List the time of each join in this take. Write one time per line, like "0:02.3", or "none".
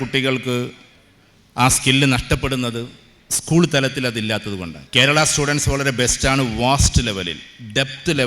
0:04.7